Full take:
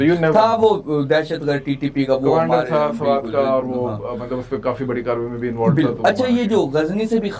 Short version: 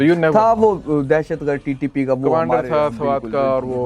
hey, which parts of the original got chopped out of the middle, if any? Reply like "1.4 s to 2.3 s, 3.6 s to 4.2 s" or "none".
none